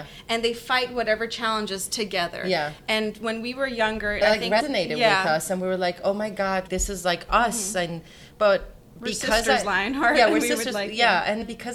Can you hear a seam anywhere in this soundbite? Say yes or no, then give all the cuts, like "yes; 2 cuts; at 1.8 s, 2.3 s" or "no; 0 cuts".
no; 0 cuts